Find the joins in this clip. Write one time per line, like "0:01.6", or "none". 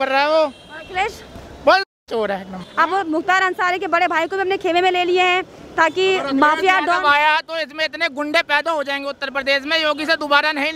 0:02.6

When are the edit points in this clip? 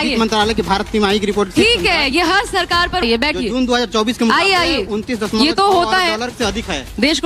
0:03.0

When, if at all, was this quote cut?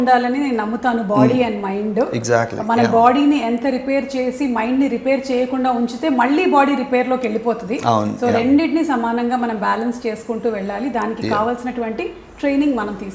none

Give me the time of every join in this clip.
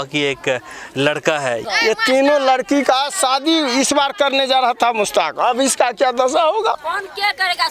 0:01.6

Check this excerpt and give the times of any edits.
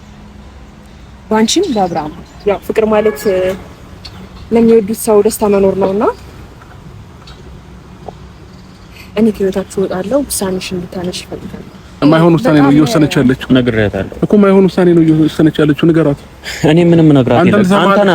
0:02.2
0:11.9

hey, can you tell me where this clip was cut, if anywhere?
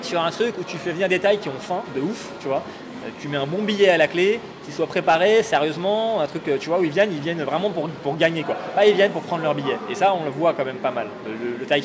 none

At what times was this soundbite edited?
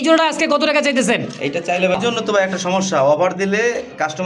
0:02.0

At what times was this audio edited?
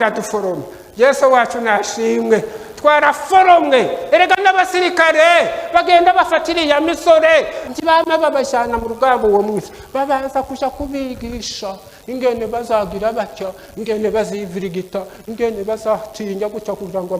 0:07.6

